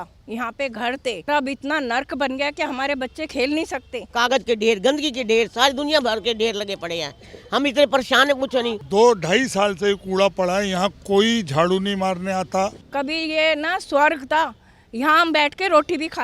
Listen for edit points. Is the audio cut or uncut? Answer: cut